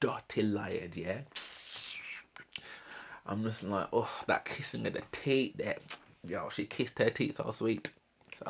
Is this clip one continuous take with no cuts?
yes; 0 cuts

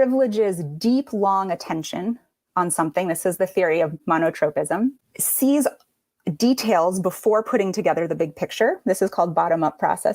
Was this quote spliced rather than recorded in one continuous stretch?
yes; 2 cuts; at 4.0 s, 5.1 s

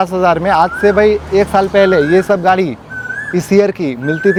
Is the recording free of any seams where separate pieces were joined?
yes; 0 cuts

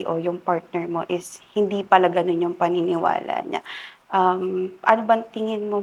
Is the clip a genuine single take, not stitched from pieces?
yes; 0 cuts

